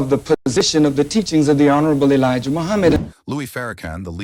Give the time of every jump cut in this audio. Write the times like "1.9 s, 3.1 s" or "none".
none